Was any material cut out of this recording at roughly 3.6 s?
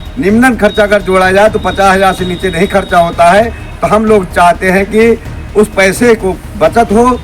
no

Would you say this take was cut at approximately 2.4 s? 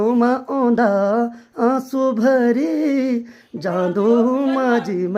no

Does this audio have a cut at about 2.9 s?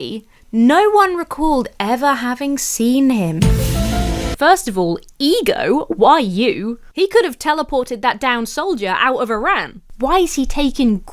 no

